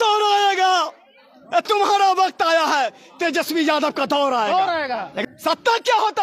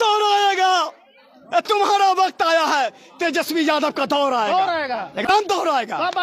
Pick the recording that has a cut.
first; 1 cut; at 5.1 s

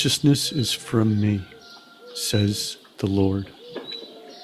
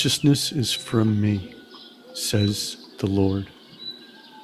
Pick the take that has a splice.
second; 1 cut; at 3.5 s

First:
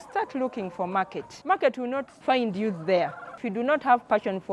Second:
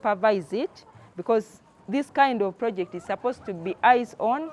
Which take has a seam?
first; 3 cuts; at 1.3 s, 2.1 s, 3.4 s

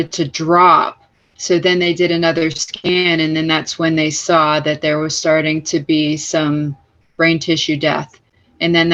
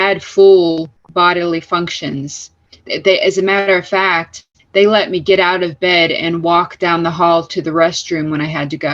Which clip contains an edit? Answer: second; 1 cut; at 1.0 s

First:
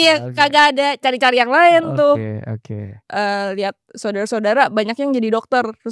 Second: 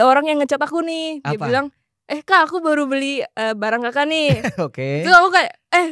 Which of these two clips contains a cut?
first; 1 cut; at 2.9 s

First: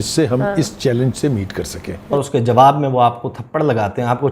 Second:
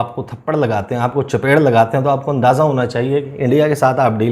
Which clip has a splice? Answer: first; 1 cut; at 2.1 s

